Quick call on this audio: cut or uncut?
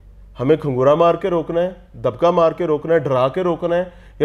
uncut